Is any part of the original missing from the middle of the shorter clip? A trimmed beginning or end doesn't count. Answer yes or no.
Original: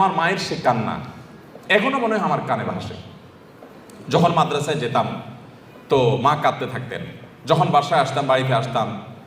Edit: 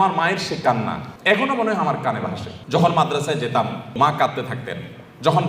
yes